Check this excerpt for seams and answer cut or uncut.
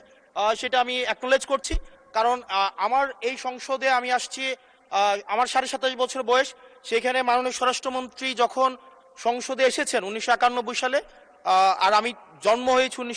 uncut